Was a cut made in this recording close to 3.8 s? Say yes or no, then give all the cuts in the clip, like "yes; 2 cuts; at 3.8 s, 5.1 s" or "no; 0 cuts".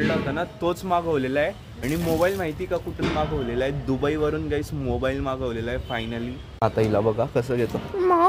no; 2 cuts; at 1.7 s, 6.6 s